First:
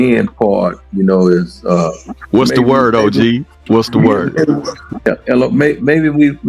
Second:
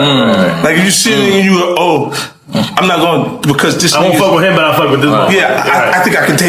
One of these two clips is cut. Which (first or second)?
first